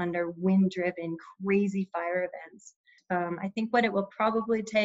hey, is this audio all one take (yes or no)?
no